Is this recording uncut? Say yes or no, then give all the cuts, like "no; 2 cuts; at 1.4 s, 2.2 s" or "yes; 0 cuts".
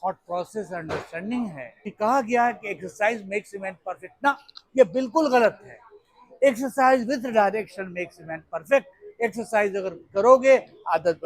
no; 1 cut; at 1.9 s